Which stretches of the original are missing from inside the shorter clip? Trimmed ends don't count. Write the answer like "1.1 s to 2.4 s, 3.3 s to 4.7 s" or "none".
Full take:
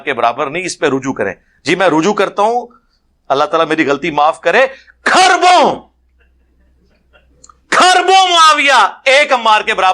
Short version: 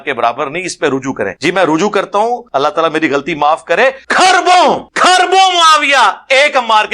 1.3 s to 1.6 s, 2.7 s to 3.2 s, 4.8 s to 5.0 s, 5.8 s to 7.6 s